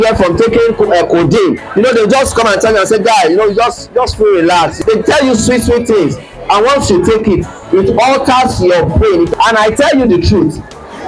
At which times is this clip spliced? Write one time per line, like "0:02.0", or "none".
0:01.6
0:04.8
0:09.3